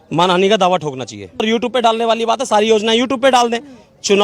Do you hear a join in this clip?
yes; 1 cut; at 1.4 s

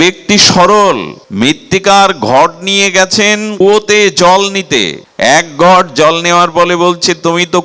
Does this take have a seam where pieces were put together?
yes; 3 cuts; at 1.2 s, 3.5 s, 5.0 s

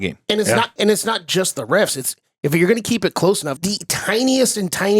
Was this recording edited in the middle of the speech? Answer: yes; 1 cut; at 3.5 s

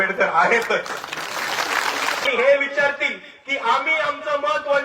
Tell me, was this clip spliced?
yes; 1 cut; at 2.3 s

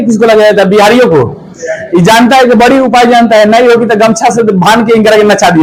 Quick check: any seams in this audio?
no; 0 cuts

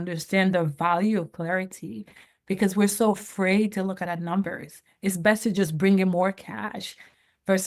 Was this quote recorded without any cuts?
yes; 0 cuts

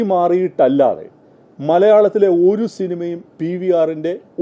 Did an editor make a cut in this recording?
no; 0 cuts

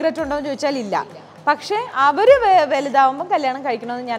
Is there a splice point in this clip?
no; 0 cuts

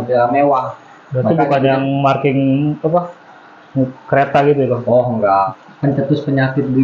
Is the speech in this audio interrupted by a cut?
yes; 1 cut; at 5.5 s

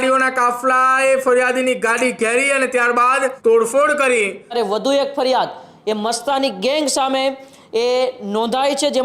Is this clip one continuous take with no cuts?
no; 2 cuts; at 3.4 s, 4.5 s

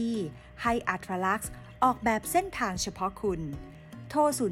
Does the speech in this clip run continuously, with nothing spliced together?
yes; 0 cuts

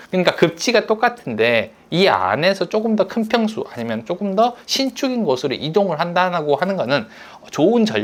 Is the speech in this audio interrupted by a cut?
no; 0 cuts

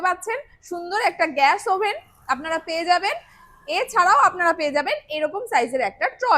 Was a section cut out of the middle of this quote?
no; 0 cuts

